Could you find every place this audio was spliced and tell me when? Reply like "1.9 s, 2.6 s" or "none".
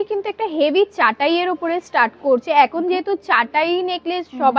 none